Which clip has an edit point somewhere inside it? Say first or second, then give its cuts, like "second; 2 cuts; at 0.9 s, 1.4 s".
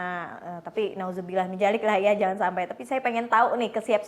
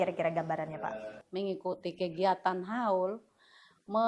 second; 1 cut; at 1.2 s